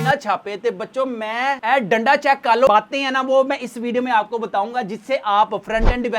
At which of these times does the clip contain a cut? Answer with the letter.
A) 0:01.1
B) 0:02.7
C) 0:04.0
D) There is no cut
B